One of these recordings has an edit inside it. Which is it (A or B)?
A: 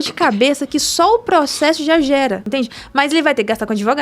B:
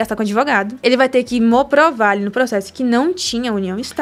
A